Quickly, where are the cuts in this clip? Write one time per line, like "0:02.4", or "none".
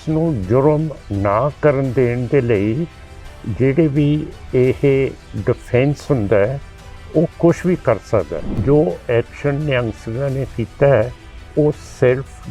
0:08.4